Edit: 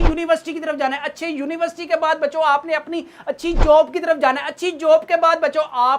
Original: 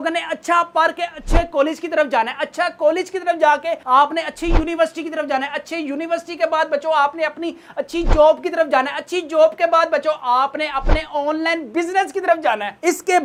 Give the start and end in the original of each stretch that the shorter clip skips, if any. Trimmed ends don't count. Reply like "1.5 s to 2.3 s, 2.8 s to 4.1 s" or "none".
none